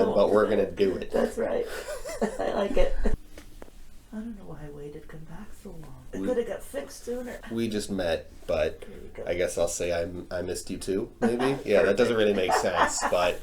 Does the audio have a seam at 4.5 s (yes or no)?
no